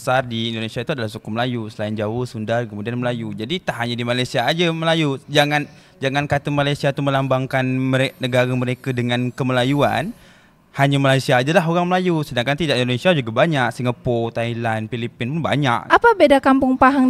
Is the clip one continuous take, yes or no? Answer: no